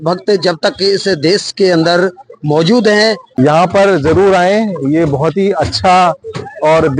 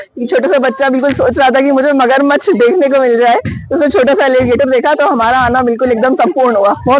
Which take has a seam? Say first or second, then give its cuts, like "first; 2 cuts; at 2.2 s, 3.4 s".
first; 1 cut; at 3.2 s